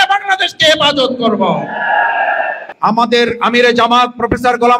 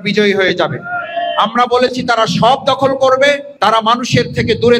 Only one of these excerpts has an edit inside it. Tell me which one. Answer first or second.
first